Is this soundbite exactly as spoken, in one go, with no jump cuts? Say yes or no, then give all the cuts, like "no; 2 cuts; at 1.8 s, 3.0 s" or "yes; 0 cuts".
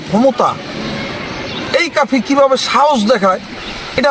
yes; 0 cuts